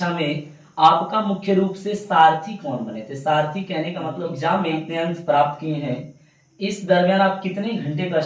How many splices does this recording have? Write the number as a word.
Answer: one